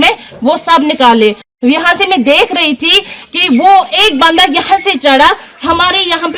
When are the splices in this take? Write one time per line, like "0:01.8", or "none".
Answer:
0:01.5